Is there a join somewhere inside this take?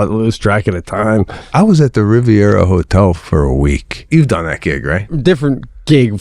yes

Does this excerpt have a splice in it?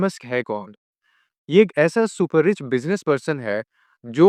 no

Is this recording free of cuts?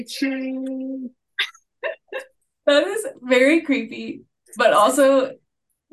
no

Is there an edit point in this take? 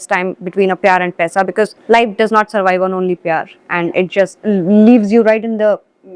yes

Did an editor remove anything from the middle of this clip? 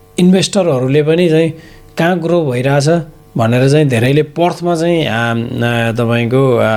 no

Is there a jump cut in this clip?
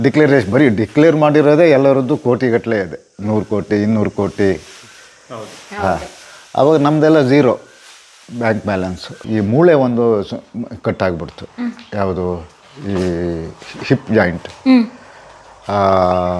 yes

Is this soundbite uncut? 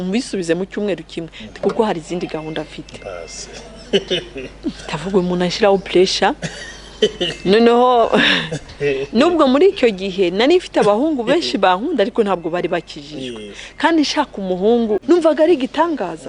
no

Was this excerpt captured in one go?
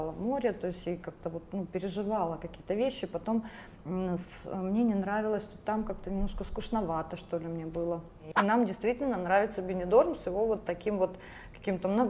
no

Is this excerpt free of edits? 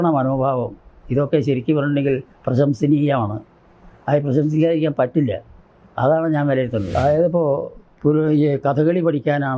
no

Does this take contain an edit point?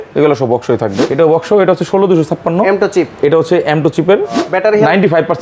yes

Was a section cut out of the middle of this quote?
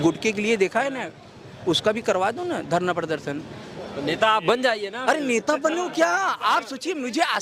no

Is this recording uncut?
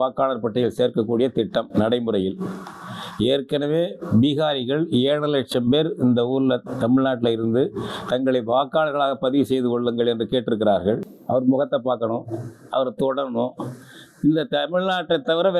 no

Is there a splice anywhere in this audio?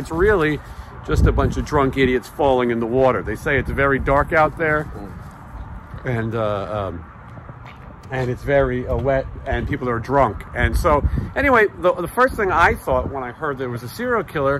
no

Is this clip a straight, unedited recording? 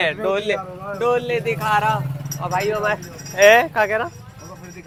yes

